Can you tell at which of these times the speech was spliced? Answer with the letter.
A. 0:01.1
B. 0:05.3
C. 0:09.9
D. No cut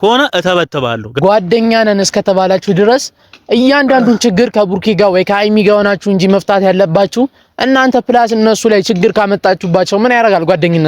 A